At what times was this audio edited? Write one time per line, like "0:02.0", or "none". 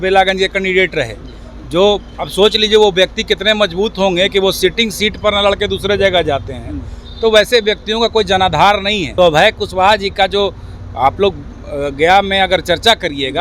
0:09.0